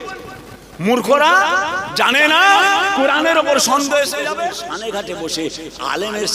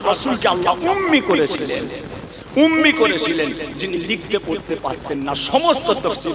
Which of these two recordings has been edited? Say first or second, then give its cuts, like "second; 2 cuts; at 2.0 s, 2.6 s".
first; 1 cut; at 4.5 s